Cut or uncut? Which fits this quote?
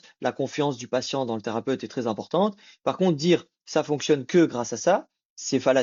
uncut